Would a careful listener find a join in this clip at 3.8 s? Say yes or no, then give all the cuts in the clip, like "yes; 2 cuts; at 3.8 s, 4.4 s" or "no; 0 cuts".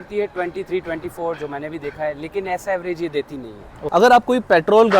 yes; 1 cut; at 3.8 s